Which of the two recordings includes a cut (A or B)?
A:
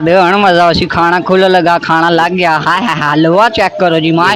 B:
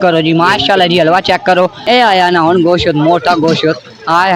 B